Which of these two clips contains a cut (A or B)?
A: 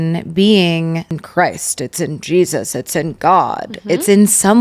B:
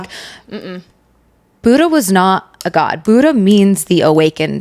A